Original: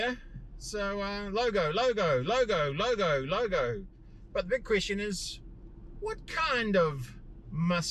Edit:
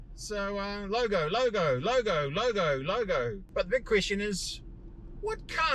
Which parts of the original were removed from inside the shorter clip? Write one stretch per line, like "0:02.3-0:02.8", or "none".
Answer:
0:03.8-0:04.2